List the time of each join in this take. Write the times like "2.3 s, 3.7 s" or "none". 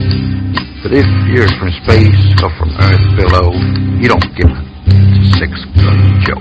4.5 s

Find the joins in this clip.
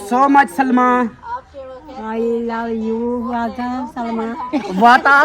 none

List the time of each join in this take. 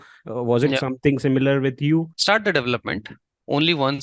2.1 s

